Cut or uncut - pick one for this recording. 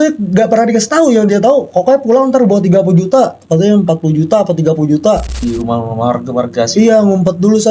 cut